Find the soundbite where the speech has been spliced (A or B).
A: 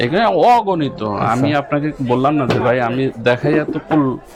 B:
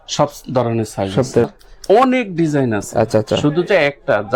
B